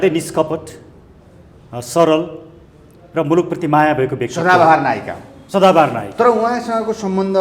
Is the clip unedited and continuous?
yes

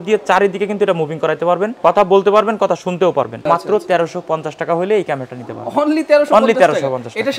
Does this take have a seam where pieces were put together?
yes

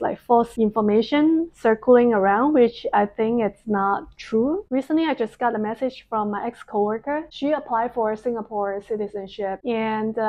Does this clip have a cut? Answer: no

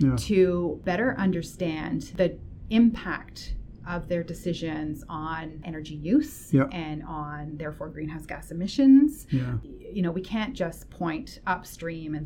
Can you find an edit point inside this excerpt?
yes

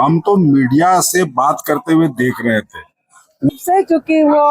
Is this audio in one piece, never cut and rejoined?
no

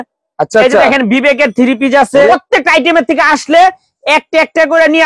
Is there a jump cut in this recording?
yes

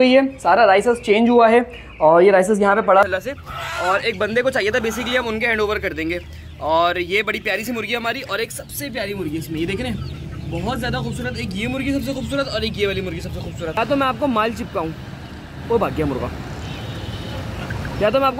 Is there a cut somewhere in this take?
yes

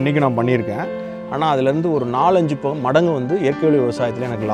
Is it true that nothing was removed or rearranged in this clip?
yes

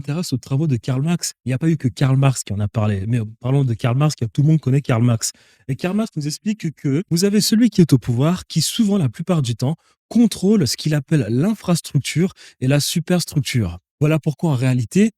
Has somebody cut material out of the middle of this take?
yes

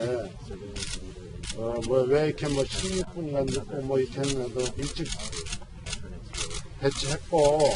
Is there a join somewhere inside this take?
no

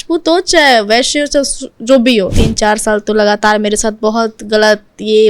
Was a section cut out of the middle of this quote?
yes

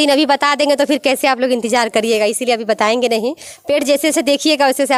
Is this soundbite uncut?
yes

